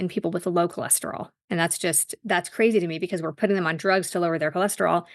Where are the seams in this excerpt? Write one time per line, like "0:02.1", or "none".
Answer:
0:01.3